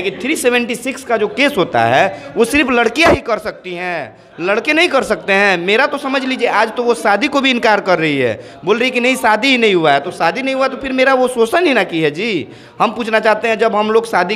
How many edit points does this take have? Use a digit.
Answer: 0